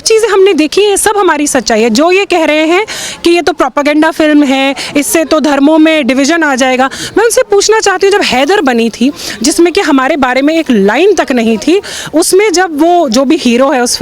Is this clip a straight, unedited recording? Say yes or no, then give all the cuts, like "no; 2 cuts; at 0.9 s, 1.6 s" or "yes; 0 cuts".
yes; 0 cuts